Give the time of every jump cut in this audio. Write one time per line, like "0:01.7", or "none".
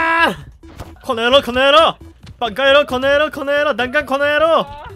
0:01.0